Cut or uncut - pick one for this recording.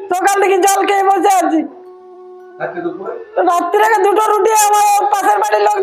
uncut